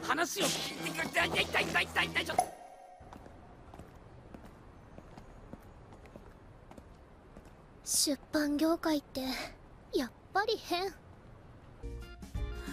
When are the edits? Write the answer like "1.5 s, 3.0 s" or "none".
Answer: none